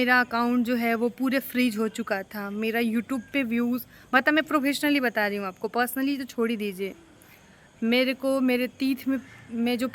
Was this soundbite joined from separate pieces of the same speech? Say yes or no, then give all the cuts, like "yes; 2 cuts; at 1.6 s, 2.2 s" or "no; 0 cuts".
no; 0 cuts